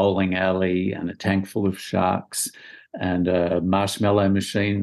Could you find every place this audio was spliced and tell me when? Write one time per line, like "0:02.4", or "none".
none